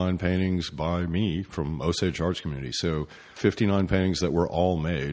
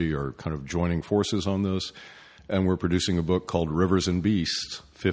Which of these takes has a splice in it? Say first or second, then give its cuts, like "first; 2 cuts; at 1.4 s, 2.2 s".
first; 1 cut; at 3.3 s